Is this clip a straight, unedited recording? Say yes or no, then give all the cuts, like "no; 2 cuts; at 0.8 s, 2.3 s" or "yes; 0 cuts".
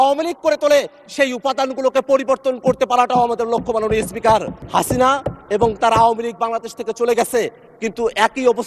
no; 1 cut; at 4.6 s